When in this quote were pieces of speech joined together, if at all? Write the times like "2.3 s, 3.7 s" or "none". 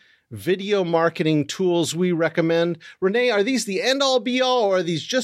none